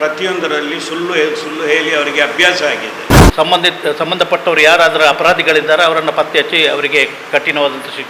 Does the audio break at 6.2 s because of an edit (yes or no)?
no